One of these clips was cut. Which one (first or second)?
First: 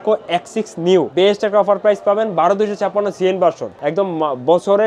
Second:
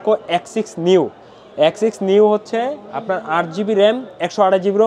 first